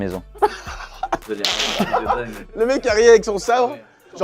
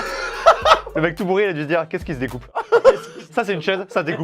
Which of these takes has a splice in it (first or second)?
second